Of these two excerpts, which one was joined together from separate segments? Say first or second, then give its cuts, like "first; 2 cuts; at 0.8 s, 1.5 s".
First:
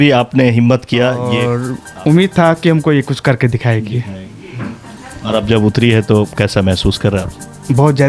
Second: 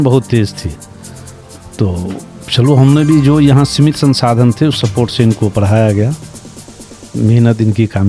first; 1 cut; at 1.5 s